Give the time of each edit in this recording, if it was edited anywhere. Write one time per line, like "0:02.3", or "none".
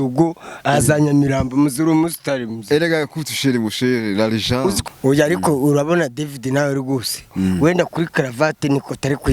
0:04.8